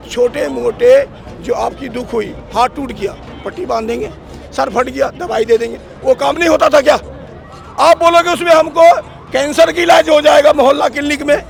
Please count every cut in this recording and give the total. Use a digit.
0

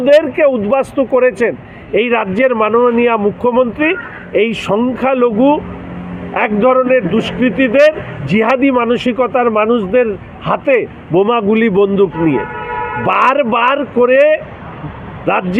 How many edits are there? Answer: 0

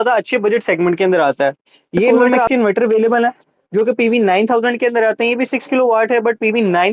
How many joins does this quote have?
1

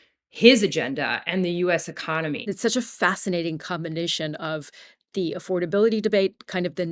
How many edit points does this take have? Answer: 1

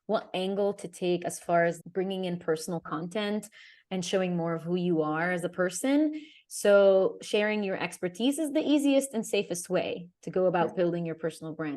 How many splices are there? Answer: 1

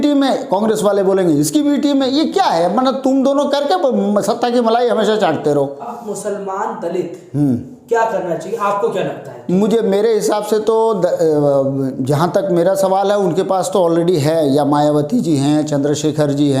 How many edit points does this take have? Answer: 1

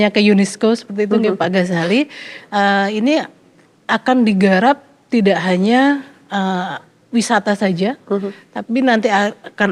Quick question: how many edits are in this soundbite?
0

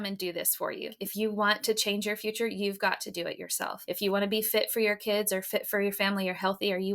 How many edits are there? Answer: 2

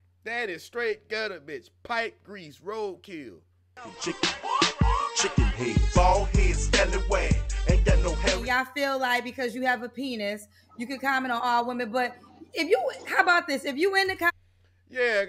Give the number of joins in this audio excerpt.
1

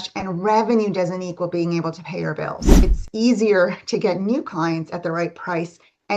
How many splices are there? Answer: 1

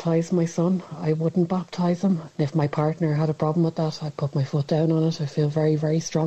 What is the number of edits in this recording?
1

